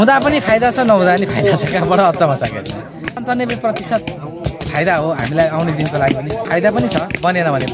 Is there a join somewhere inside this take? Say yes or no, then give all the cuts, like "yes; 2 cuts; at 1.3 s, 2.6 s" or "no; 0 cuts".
yes; 2 cuts; at 3.2 s, 6.4 s